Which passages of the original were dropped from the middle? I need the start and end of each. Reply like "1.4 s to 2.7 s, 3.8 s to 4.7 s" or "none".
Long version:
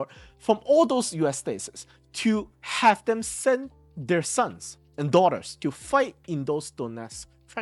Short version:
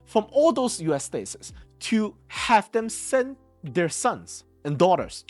none